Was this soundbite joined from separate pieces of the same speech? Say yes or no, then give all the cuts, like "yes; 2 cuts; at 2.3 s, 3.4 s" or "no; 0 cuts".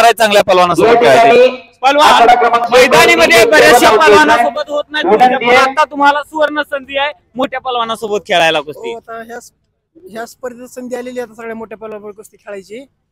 no; 0 cuts